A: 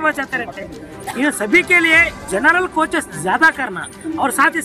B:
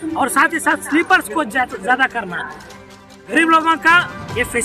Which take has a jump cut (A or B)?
B